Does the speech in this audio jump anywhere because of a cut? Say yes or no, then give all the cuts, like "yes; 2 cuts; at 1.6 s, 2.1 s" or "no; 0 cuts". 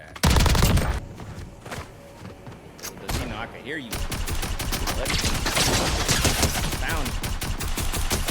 yes; 1 cut; at 1.0 s